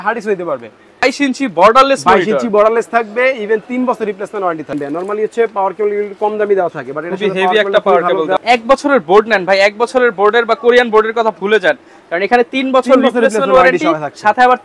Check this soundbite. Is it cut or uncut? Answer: cut